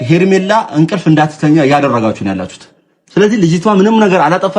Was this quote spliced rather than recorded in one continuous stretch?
yes; 1 cut; at 1.0 s

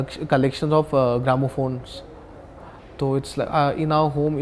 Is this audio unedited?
yes; 0 cuts

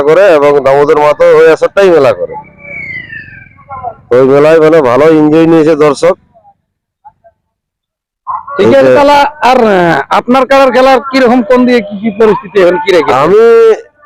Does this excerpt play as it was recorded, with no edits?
yes; 0 cuts

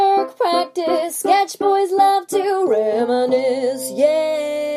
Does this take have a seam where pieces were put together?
no; 0 cuts

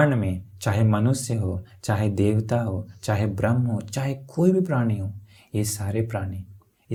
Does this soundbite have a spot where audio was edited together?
no; 0 cuts

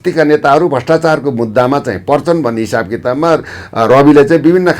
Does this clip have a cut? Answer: no; 0 cuts

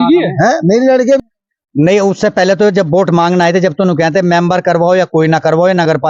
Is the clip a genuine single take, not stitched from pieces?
no; 1 cut; at 1.2 s

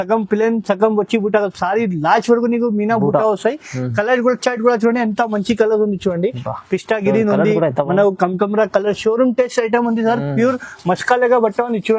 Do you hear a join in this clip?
no; 0 cuts

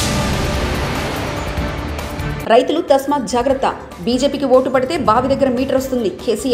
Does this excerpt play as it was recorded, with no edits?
no; 1 cut; at 2.3 s

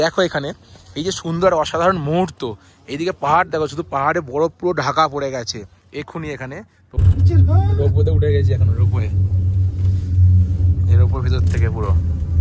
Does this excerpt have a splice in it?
yes; 1 cut; at 7.0 s

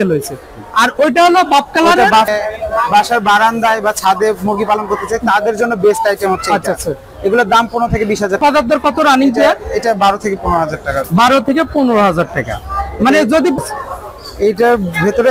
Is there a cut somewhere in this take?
yes; 3 cuts; at 2.3 s, 8.4 s, 13.6 s

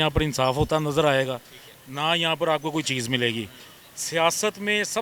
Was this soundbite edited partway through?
no; 0 cuts

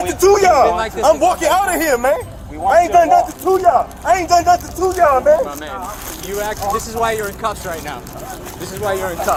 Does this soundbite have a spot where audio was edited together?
no; 0 cuts

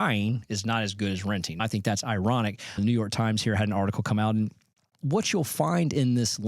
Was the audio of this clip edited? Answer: yes; 3 cuts; at 1.6 s, 2.8 s, 5.0 s

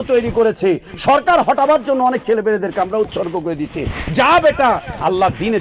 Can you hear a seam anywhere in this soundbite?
no; 0 cuts

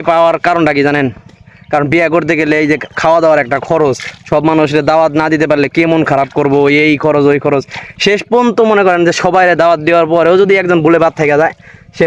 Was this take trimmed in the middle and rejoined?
no; 0 cuts

